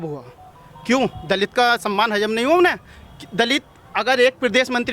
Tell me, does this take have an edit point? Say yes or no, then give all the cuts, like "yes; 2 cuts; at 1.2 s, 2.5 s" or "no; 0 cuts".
no; 0 cuts